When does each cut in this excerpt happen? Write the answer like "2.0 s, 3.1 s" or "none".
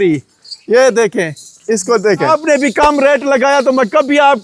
2.3 s